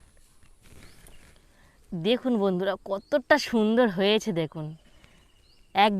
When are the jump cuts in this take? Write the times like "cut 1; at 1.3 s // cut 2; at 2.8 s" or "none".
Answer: cut 1; at 1.4 s